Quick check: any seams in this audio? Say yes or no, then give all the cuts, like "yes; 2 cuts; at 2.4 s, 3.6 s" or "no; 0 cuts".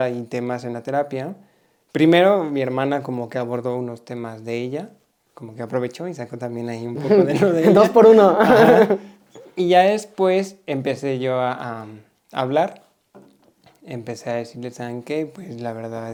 no; 0 cuts